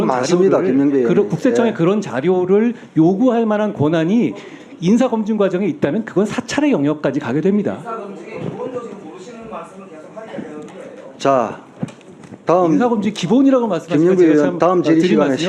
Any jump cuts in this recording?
no; 0 cuts

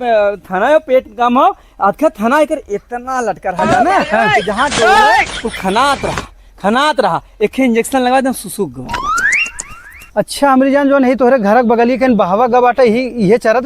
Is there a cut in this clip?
no; 0 cuts

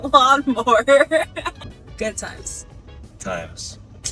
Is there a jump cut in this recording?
yes; 1 cut; at 1.6 s

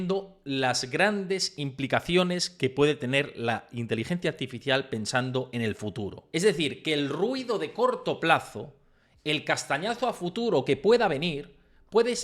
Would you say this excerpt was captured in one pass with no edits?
no; 1 cut; at 6.2 s

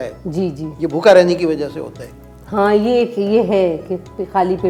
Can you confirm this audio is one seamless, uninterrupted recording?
yes; 0 cuts

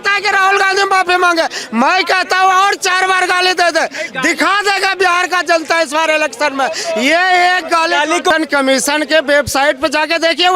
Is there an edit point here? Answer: yes; 1 cut; at 8.3 s

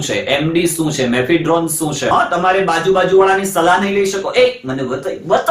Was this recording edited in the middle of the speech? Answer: yes; 1 cut; at 2.1 s

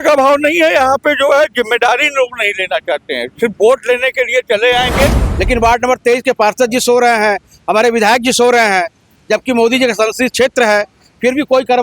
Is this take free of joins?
no; 1 cut; at 5.3 s

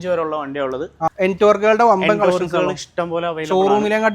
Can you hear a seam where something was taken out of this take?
yes; 1 cut; at 1.1 s

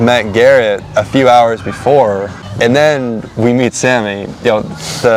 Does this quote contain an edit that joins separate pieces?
yes; 1 cut; at 2.4 s

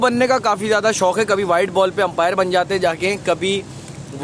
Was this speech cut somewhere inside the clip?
no; 0 cuts

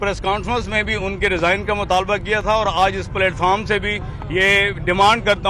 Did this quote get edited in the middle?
no; 0 cuts

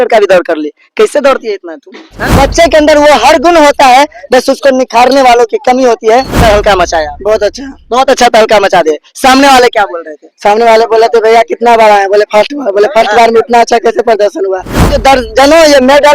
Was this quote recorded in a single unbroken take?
no; 3 cuts; at 2.3 s, 6.4 s, 14.9 s

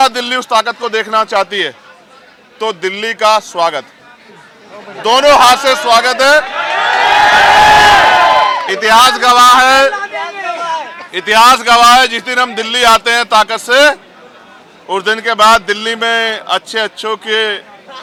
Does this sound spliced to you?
no; 0 cuts

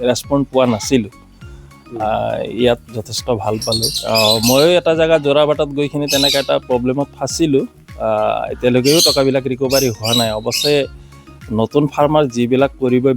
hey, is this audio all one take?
no; 1 cut; at 3.9 s

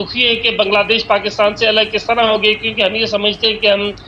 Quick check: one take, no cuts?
yes; 0 cuts

